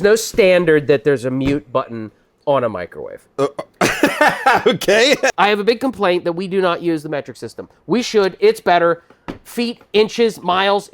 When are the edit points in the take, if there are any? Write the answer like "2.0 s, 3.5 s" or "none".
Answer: 5.3 s